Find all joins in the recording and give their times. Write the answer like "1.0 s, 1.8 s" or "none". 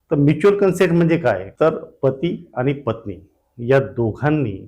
1.5 s

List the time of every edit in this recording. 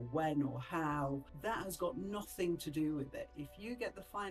3.3 s

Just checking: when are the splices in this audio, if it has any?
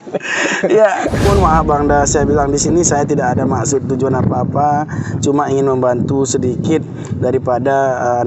1.2 s

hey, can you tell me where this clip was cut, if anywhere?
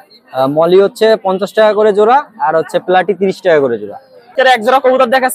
4.3 s

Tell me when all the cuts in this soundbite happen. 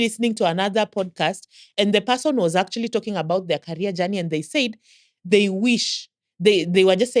1.7 s

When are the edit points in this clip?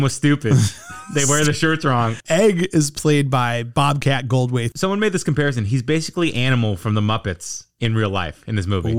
2.2 s, 4.7 s

